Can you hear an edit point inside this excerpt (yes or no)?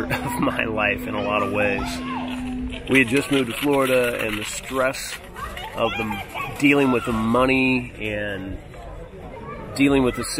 no